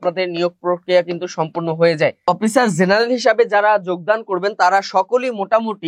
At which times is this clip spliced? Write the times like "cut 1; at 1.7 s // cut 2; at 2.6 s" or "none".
cut 1; at 2.3 s